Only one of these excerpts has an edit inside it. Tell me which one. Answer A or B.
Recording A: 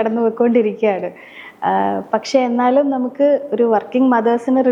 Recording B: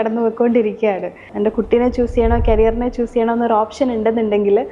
B